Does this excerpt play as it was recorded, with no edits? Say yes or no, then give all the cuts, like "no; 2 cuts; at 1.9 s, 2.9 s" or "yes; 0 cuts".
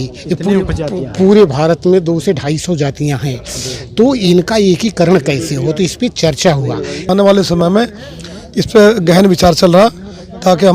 no; 1 cut; at 7.0 s